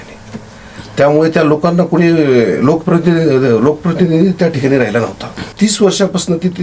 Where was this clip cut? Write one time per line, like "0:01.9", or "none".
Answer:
0:05.4

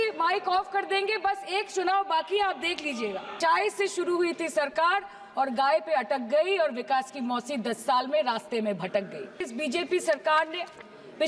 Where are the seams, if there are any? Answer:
0:03.3
0:09.5

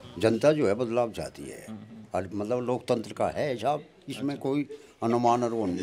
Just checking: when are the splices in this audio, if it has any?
none

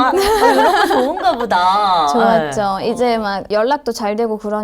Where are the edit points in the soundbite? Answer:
0:03.5

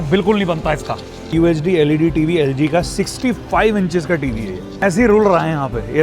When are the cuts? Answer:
0:01.3
0:04.8

